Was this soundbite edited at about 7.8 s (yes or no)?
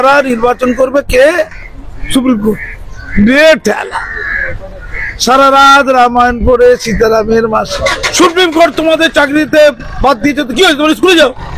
yes